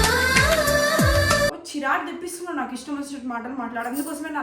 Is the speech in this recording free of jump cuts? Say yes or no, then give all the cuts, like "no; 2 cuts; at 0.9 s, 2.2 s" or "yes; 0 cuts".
no; 1 cut; at 1.6 s